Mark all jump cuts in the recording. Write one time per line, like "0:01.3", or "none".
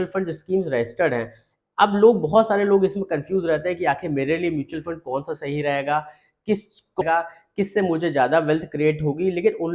0:07.0